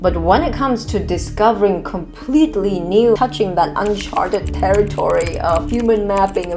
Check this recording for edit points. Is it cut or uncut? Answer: cut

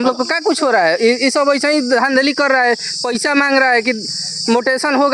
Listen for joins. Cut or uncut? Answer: uncut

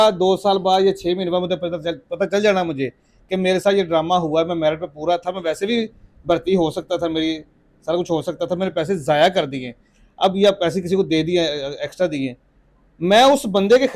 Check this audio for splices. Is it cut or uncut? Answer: uncut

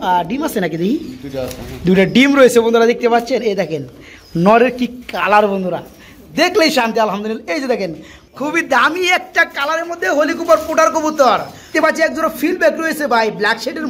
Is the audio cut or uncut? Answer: cut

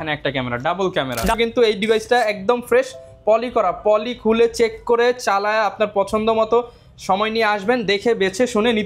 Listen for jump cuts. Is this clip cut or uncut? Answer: cut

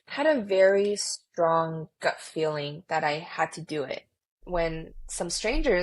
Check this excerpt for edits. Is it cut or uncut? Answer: cut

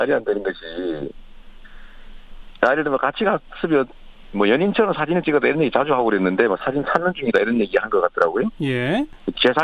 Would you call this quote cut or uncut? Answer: cut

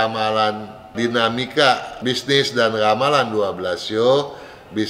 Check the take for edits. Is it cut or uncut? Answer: cut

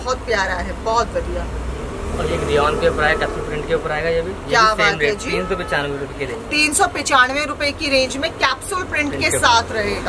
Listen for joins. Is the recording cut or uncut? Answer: uncut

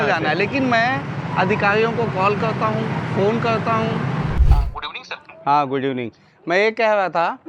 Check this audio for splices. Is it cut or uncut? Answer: cut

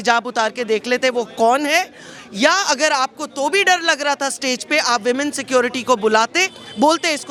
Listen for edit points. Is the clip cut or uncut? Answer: uncut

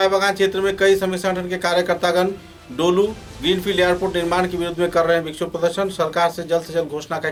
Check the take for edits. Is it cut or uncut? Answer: uncut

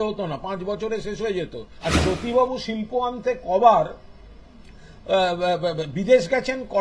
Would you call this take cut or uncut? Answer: cut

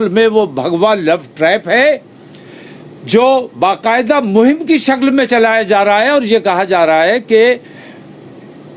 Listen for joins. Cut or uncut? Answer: uncut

